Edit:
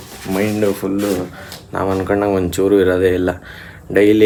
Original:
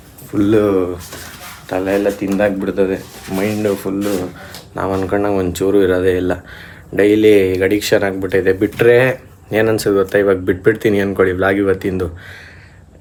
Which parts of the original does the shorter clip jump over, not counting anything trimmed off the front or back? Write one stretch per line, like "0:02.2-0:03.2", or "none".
none